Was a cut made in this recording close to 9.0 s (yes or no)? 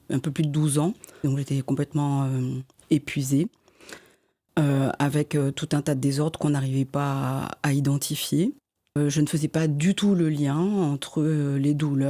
yes